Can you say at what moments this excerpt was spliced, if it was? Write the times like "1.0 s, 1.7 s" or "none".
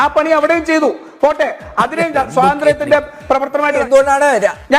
3.8 s